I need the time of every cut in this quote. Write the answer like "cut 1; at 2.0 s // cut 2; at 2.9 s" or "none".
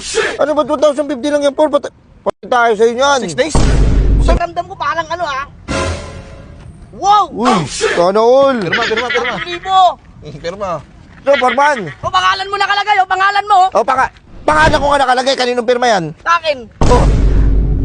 cut 1; at 4.4 s // cut 2; at 11.3 s